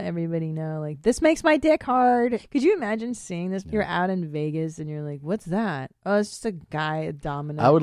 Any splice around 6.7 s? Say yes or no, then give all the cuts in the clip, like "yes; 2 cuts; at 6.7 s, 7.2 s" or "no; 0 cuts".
no; 2 cuts; at 2.4 s, 3.6 s